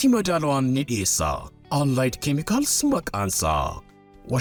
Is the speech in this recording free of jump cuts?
yes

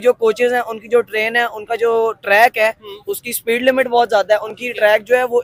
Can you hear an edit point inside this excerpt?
no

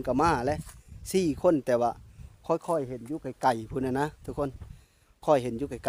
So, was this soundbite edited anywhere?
no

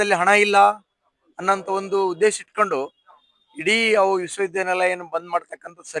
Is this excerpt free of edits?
yes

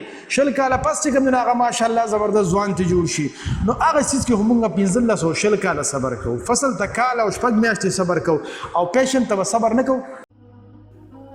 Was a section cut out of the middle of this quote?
yes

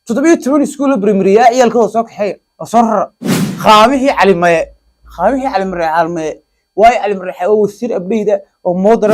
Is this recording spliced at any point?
yes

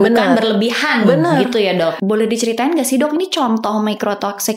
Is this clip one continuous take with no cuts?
no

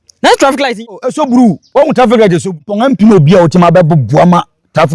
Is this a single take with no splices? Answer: no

